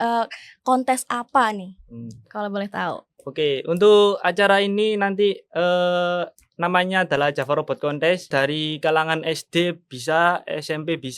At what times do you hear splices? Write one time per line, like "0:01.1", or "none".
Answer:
0:08.3